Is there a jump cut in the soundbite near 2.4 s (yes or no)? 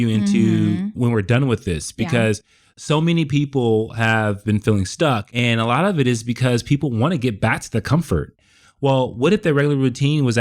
no